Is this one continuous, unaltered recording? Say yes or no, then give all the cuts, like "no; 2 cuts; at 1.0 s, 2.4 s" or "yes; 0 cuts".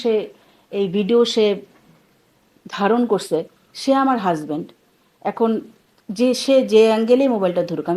yes; 0 cuts